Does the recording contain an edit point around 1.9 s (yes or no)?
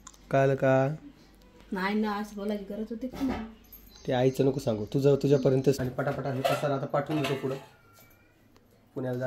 no